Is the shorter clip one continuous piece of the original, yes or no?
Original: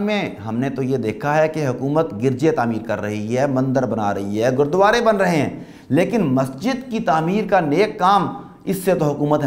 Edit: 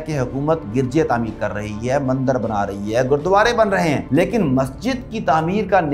no